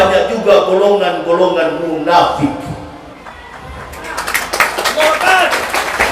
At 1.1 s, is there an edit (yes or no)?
no